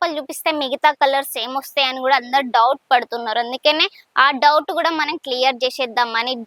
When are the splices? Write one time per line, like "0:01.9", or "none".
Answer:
none